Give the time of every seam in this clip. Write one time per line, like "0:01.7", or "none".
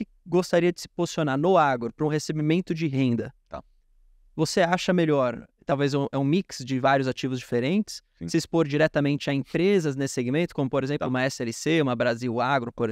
none